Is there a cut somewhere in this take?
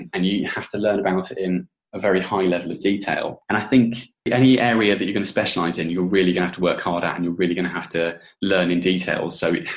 no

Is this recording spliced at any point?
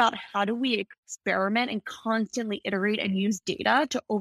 no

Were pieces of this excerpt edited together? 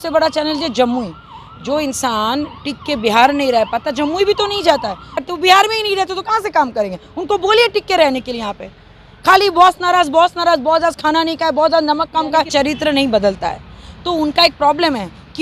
yes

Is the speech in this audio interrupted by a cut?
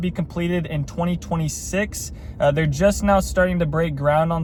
no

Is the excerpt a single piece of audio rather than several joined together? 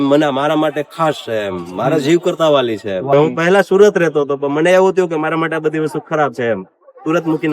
no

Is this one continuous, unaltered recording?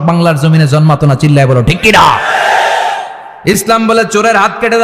no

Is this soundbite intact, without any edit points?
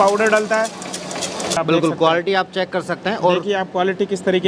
no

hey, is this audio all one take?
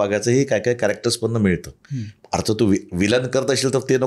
yes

